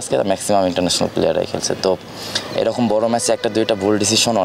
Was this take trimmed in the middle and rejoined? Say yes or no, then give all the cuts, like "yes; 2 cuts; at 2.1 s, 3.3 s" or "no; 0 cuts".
no; 0 cuts